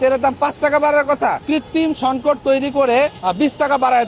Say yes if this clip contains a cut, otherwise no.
yes